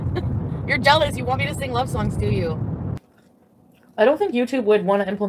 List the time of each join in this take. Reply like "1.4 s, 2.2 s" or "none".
3.0 s